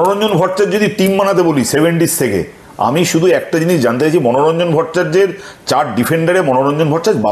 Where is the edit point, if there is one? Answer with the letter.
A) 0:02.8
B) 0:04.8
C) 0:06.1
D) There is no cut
D